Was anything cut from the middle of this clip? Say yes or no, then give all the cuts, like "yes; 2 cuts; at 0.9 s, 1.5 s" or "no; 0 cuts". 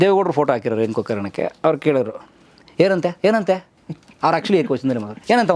no; 0 cuts